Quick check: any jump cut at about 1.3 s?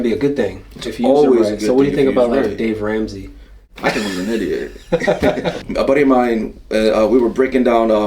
no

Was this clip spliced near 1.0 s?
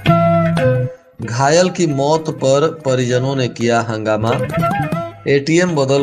yes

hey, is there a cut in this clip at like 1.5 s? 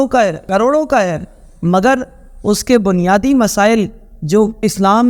no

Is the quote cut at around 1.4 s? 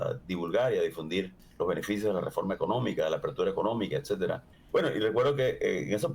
yes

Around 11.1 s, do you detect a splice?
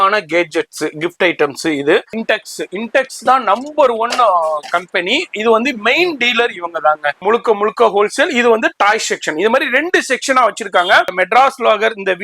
yes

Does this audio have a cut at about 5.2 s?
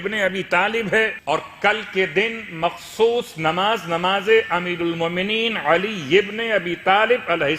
no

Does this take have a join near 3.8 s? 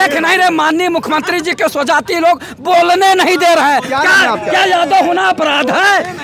no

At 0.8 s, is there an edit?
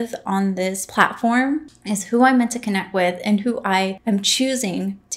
yes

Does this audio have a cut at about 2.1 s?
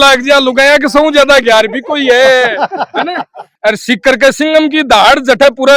no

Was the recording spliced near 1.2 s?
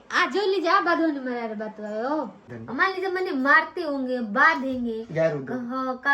no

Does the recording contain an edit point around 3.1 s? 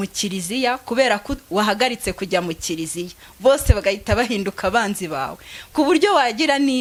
no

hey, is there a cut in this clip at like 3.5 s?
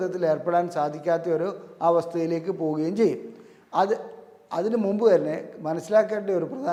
no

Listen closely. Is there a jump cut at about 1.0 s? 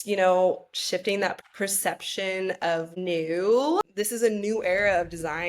no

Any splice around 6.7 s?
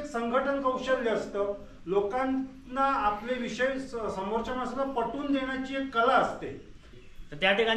yes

